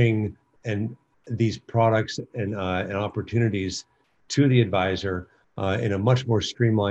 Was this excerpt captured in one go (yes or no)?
yes